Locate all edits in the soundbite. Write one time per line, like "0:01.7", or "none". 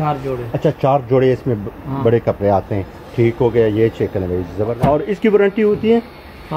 0:04.6

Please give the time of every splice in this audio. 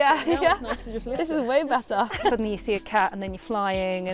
0:02.3

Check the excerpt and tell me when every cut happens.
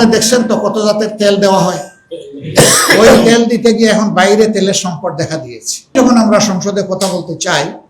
0:05.9

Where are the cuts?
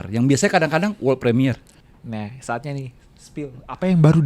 0:01.8

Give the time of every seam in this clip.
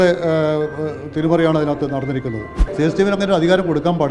0:02.6

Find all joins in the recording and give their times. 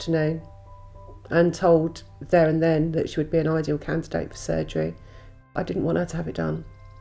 0:05.2

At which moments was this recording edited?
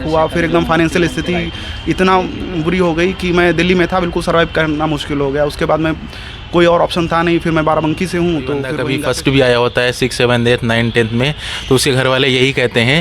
0:08.8

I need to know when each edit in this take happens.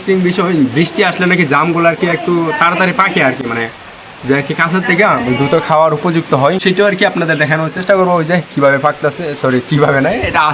none

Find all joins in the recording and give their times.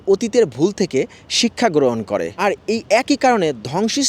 0:02.3

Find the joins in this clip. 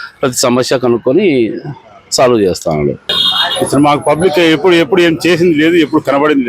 0:03.1

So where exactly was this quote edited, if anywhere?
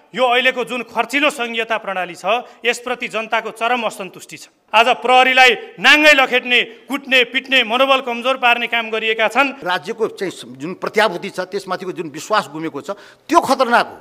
0:04.6
0:09.6

